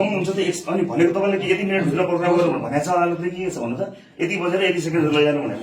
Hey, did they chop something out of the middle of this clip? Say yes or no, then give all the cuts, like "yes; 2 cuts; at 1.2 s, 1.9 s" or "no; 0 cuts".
no; 0 cuts